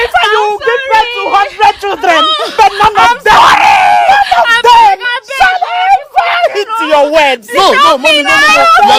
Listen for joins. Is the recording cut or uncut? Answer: uncut